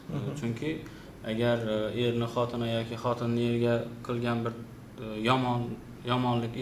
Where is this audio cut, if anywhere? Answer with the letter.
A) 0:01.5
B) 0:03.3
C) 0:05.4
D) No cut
D